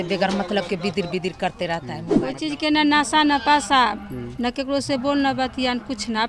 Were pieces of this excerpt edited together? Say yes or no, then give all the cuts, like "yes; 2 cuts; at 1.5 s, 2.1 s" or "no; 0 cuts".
yes; 1 cut; at 2.2 s